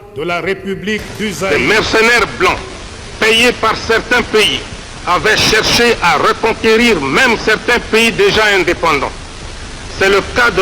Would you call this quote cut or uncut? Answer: cut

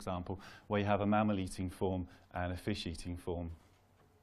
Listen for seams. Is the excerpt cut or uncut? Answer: cut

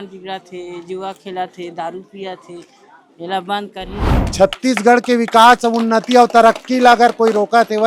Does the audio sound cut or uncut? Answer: cut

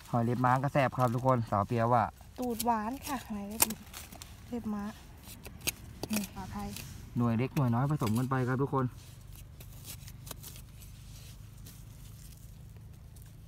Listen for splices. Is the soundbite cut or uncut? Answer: cut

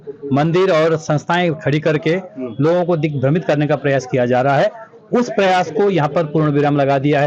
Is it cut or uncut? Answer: uncut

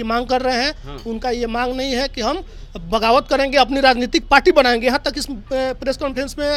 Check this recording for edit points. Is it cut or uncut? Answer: uncut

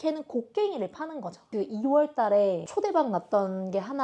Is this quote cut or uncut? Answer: cut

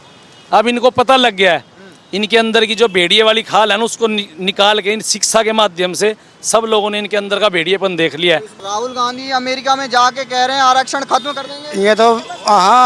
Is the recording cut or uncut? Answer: cut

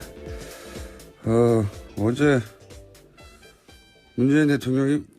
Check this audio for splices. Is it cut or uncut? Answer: cut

